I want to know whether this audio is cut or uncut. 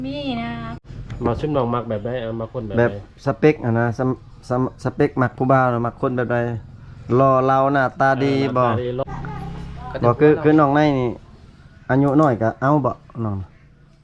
cut